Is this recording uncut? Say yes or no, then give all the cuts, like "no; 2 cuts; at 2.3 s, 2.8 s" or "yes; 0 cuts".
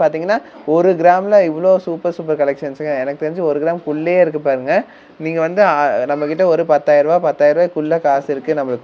yes; 0 cuts